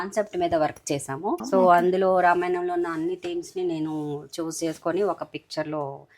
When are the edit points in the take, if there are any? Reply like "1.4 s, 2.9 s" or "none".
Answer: 1.4 s